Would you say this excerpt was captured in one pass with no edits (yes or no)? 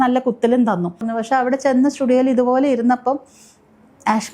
no